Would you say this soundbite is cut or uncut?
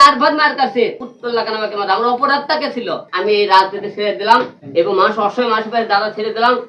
cut